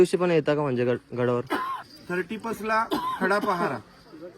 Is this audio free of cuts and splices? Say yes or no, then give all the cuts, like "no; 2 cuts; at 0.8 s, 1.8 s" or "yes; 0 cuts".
no; 1 cut; at 1.9 s